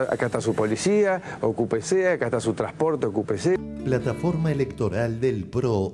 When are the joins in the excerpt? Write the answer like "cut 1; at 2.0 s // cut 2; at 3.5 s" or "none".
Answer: none